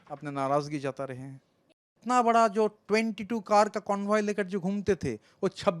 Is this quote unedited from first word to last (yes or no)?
no